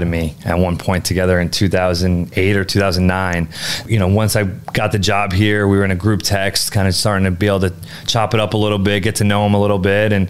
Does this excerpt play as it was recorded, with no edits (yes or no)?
no